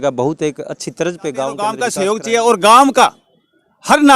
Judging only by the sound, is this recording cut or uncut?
cut